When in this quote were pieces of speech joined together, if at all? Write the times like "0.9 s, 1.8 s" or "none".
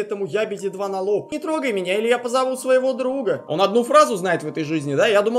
1.3 s, 3.4 s